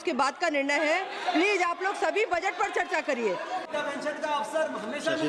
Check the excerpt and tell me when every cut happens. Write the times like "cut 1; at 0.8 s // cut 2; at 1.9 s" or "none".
cut 1; at 3.7 s